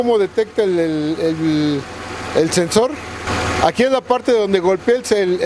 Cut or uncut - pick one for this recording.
cut